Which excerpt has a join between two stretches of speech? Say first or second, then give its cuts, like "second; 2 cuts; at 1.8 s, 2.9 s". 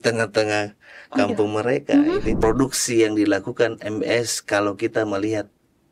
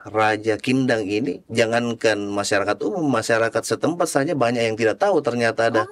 first; 1 cut; at 2.3 s